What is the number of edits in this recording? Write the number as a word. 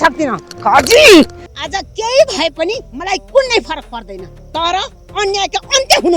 one